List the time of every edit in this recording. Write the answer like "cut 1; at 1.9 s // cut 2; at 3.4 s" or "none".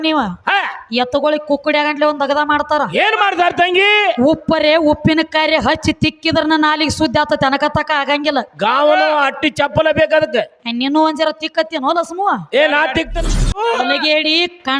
cut 1; at 13.6 s